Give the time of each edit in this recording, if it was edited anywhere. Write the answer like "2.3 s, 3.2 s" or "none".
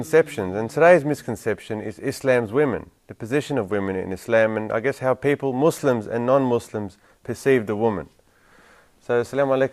4.6 s